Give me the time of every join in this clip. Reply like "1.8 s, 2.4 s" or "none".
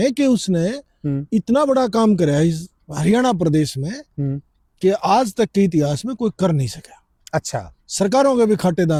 none

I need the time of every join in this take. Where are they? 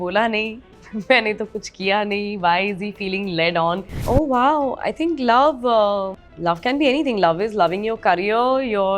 3.9 s, 6.2 s

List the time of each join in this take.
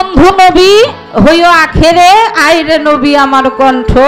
none

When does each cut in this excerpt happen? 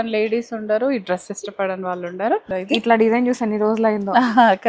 2.5 s

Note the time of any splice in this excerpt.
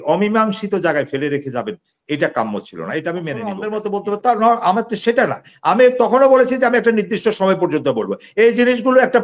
3.7 s

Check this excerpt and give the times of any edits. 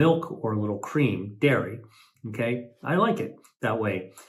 none

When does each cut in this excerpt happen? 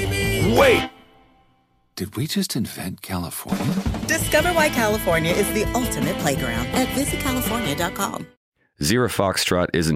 8.3 s

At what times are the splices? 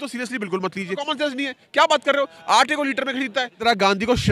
1.0 s, 3.5 s

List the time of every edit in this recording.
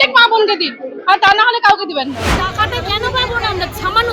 2.3 s

